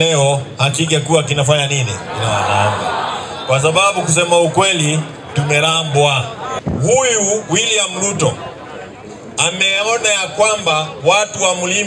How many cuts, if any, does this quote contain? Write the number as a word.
one